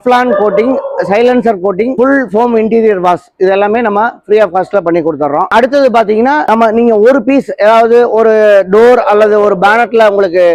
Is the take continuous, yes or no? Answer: yes